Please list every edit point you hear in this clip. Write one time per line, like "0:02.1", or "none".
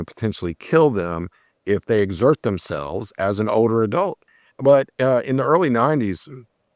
0:04.2